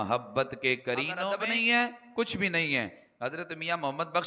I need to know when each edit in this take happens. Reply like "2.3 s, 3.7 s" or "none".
1.2 s